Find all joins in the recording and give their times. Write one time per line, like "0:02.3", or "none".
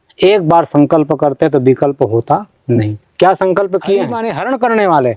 0:04.2

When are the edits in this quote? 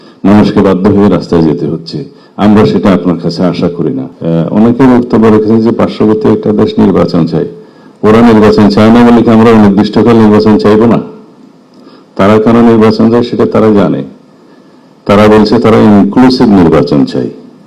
0:04.1

